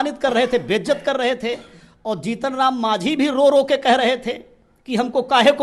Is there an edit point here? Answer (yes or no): no